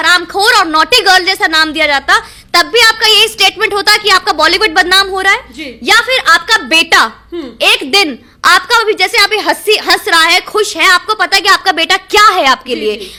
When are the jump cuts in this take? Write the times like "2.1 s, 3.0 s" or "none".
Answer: none